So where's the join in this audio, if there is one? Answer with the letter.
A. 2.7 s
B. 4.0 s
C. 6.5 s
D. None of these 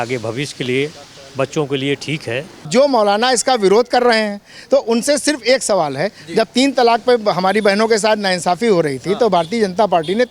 A